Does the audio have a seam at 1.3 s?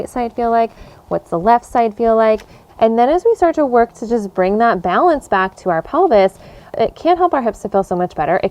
no; 2 cuts; at 2.6 s, 6.7 s

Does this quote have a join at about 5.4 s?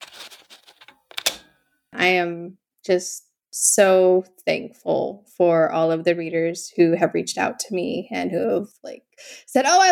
no; 1 cut; at 1.9 s

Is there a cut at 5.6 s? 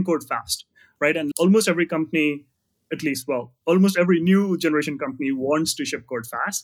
no; 1 cut; at 1.3 s

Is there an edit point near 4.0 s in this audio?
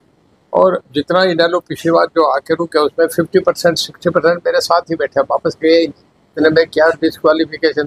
no; 1 cut; at 6.3 s

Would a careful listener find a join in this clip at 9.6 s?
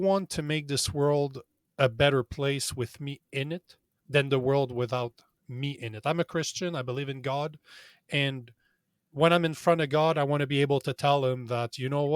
no; 1 cut; at 3.9 s

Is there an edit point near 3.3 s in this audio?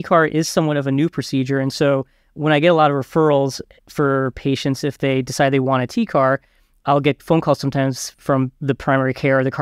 no; 2 cuts; at 6.8 s, 8.6 s

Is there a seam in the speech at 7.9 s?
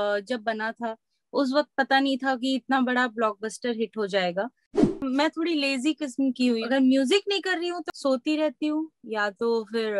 yes; 3 cuts; at 4.9 s, 6.6 s, 7.9 s

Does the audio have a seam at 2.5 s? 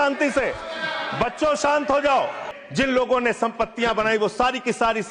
yes; 1 cut; at 2.5 s

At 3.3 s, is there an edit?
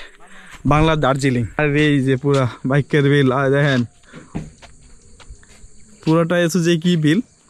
no; 1 cut; at 1.6 s

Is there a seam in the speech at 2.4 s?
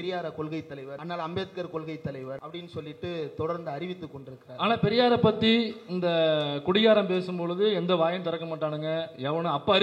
yes; 2 cuts; at 1.0 s, 2.4 s

